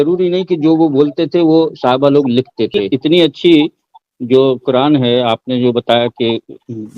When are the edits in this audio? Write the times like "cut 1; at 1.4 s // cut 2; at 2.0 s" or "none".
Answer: cut 1; at 2.9 s